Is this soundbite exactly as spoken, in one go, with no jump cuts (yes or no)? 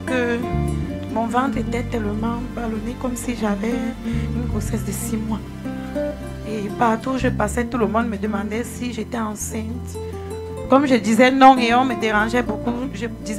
yes